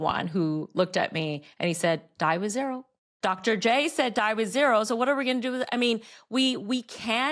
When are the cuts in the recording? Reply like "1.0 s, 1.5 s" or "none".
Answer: none